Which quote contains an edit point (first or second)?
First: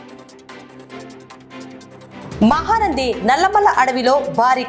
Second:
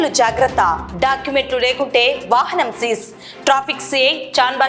first